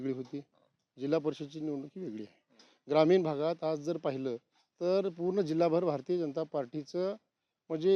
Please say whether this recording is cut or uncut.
uncut